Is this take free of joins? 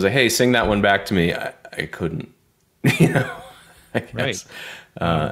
yes; 0 cuts

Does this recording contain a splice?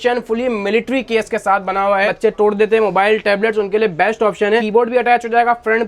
yes; 2 cuts; at 2.1 s, 4.6 s

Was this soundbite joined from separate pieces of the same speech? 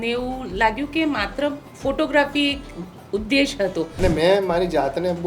yes; 1 cut; at 3.9 s

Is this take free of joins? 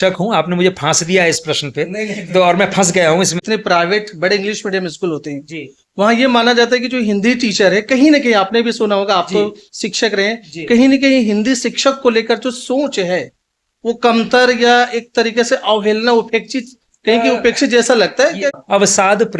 no; 2 cuts; at 3.4 s, 18.6 s

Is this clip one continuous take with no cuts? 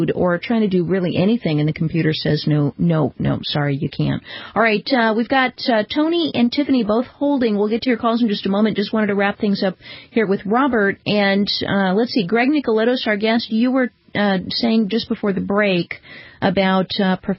yes; 0 cuts

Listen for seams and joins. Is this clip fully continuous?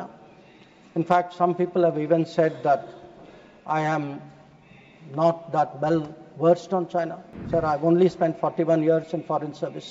yes; 0 cuts

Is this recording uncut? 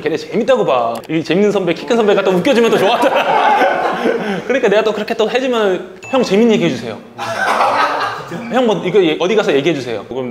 yes; 0 cuts

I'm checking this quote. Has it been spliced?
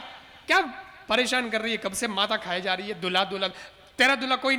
no; 0 cuts

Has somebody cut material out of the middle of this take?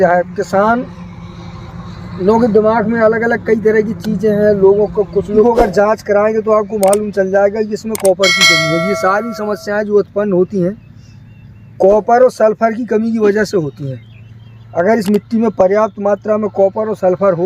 yes; 1 cut; at 5.4 s

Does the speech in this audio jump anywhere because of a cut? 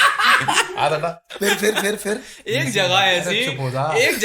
yes; 1 cut; at 1.3 s

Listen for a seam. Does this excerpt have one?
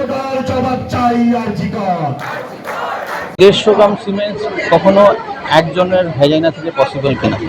yes; 1 cut; at 3.4 s

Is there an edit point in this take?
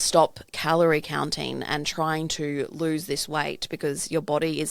no; 0 cuts

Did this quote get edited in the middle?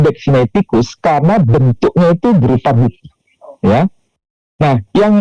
no; 0 cuts

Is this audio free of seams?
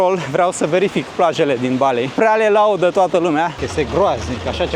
no; 2 cuts; at 2.1 s, 3.6 s

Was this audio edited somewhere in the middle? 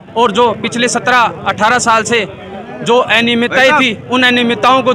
no; 0 cuts

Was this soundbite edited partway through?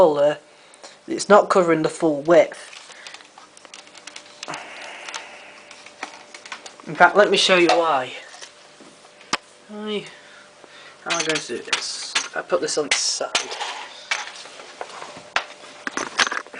no; 0 cuts

